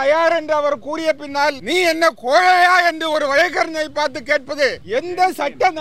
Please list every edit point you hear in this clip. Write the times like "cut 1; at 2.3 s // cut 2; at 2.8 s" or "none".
cut 1; at 1.6 s // cut 2; at 4.8 s